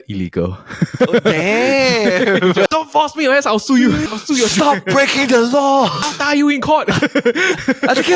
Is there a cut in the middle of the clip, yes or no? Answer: yes